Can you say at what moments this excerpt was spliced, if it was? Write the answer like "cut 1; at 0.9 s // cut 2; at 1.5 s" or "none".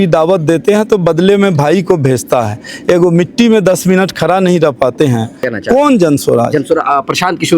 cut 1; at 5.5 s